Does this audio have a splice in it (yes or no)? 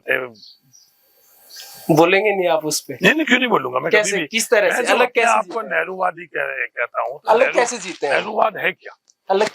no